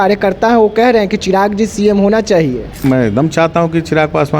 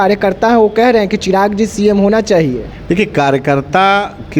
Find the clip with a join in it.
first; 1 cut; at 2.8 s

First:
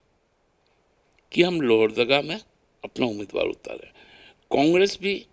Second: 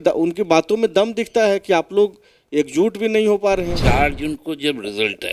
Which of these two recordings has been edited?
second; 1 cut; at 3.8 s

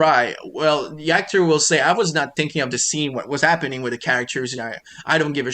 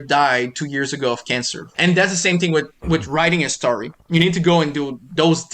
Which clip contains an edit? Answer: second; 1 cut; at 1.6 s

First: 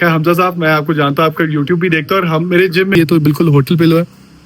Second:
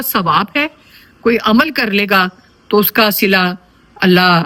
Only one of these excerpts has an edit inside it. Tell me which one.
first; 1 cut; at 2.9 s

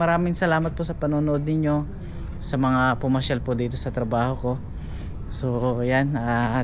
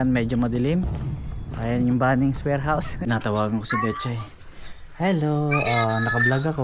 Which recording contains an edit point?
second; 1 cut; at 3.0 s

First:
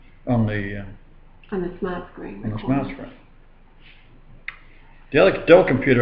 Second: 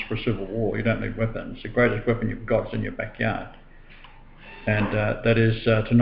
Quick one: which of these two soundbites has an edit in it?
first; 1 cut; at 4.9 s

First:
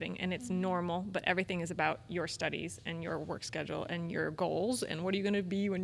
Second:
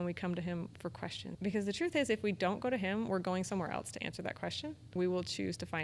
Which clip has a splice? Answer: second; 2 cuts; at 1.3 s, 4.8 s

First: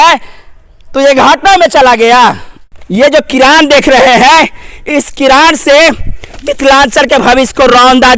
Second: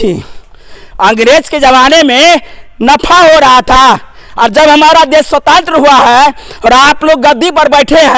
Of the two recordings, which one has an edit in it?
first; 1 cut; at 2.8 s

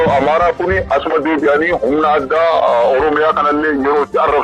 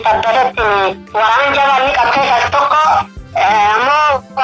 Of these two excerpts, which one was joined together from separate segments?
second; 1 cut; at 1.1 s

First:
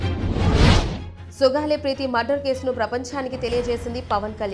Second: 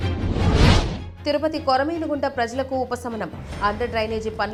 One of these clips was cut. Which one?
first; 1 cut; at 1.0 s

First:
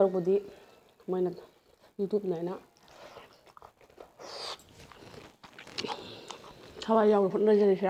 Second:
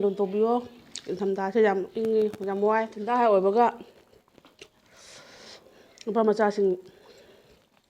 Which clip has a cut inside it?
second; 1 cut; at 3.0 s

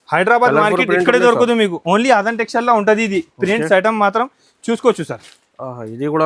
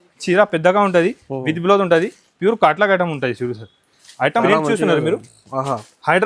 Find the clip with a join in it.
second; 1 cut; at 4.4 s

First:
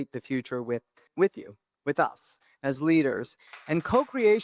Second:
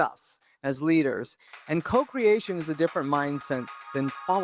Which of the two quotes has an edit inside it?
first; 1 cut; at 1.0 s

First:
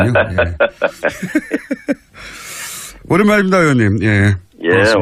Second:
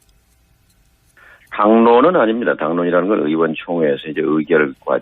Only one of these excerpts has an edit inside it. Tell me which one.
second; 1 cut; at 2.0 s

